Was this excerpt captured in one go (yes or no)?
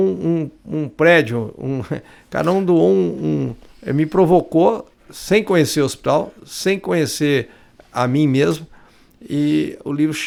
yes